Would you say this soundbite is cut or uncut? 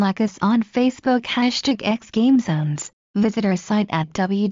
cut